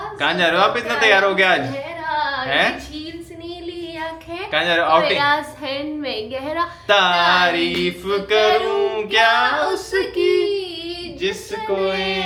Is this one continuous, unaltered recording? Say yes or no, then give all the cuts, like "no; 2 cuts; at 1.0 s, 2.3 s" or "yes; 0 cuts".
yes; 0 cuts